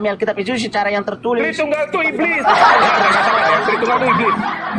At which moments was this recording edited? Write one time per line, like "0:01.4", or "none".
none